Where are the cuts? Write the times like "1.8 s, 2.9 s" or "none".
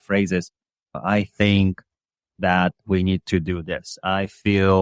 0.9 s